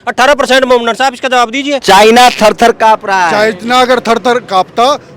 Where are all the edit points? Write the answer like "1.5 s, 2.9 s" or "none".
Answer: 1.7 s